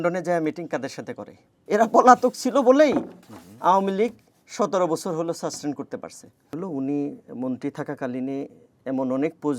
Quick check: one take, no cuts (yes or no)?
no